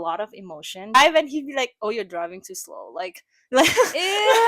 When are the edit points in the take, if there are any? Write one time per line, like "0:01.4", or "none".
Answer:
0:00.9

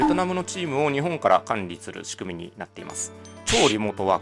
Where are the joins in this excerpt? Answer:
none

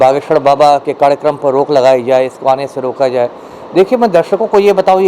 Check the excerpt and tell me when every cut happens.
none

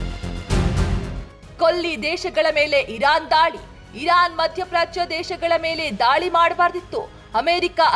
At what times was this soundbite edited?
0:01.4

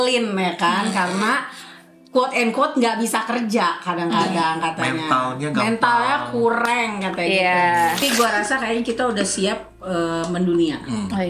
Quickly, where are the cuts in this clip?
0:08.0

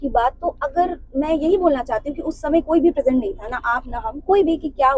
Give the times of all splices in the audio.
none

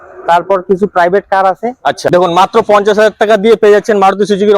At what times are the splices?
0:02.1

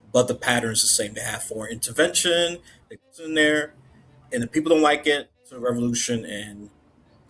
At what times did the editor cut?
0:03.1
0:05.5

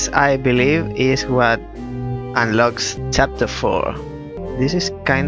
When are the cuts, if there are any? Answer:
0:02.9
0:04.4

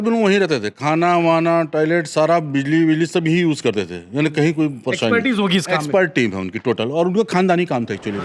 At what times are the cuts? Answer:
none

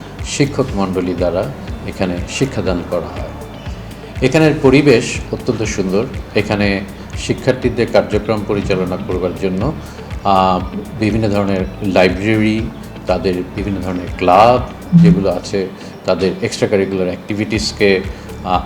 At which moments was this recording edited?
none

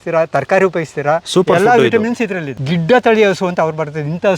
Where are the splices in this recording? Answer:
0:02.5

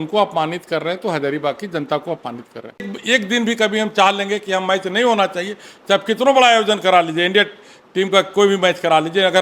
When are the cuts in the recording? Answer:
0:02.9

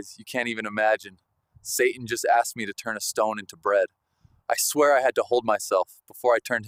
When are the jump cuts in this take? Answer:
none

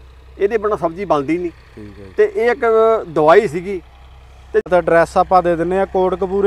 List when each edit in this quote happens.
0:04.7

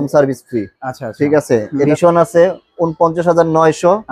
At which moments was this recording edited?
0:01.9

